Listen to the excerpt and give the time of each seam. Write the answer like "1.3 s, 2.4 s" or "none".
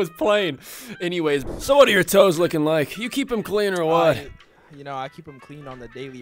1.5 s